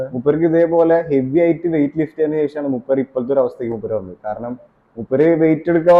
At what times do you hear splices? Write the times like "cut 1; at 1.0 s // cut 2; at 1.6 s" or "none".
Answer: none